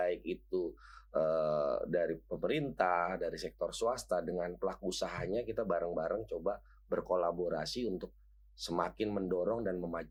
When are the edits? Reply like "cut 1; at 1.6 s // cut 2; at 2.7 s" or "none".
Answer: none